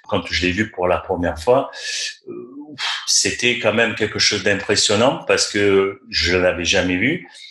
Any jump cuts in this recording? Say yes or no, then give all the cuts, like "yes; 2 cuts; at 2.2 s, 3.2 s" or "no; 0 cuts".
no; 0 cuts